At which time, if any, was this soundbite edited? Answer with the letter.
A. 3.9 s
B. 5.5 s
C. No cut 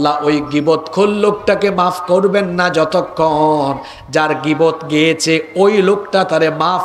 C